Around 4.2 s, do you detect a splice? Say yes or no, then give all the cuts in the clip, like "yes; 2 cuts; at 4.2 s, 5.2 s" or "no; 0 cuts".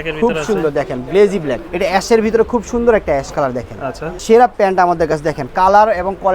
yes; 2 cuts; at 1.7 s, 4.2 s